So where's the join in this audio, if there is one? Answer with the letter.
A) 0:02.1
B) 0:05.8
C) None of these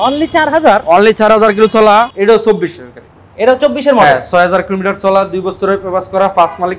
A